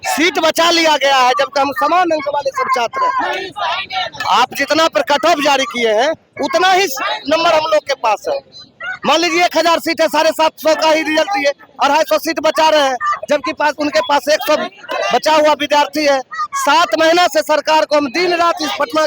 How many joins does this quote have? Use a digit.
0